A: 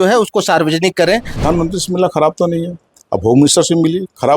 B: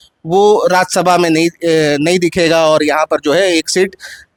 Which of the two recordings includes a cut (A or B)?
A